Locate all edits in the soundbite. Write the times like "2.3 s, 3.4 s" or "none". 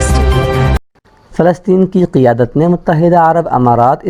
1.1 s